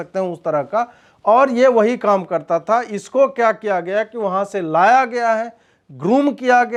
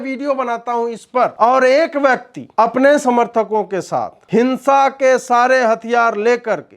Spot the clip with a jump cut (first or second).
second